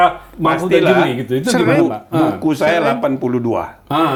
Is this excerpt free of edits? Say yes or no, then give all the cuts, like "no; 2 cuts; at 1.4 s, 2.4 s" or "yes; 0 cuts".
yes; 0 cuts